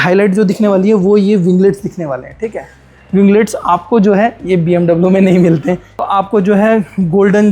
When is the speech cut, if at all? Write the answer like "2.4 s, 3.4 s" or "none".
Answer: 5.9 s